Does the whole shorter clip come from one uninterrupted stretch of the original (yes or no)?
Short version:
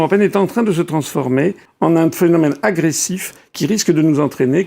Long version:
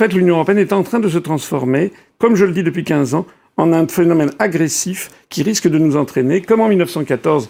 no